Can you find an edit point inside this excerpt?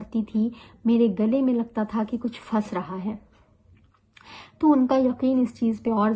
no; 0 cuts

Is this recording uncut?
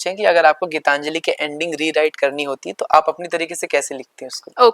yes; 0 cuts

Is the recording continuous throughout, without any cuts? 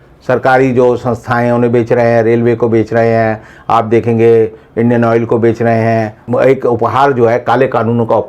no; 1 cut; at 6.2 s

